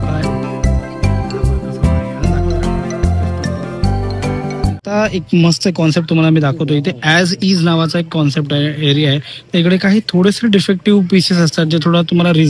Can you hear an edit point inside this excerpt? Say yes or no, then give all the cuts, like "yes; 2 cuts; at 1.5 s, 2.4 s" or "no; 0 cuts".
yes; 1 cut; at 4.9 s